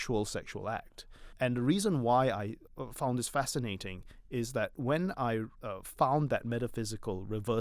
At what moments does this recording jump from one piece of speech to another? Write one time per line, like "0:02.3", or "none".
0:01.3
0:02.6
0:05.6